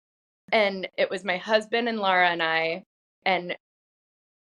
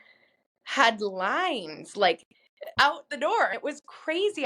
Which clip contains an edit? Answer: second; 1 cut; at 2.8 s

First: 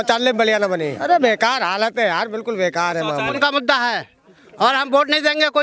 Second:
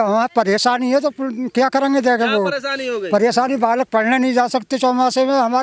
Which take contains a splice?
first; 2 cuts; at 1.0 s, 3.4 s

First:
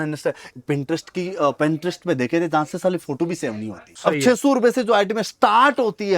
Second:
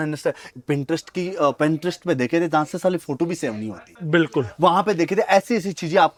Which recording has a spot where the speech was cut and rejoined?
first; 1 cut; at 3.9 s

